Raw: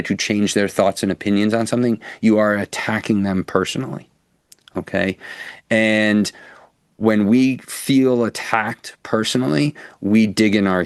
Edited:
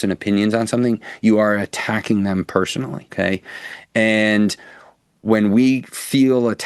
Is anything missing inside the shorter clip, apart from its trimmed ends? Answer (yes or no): yes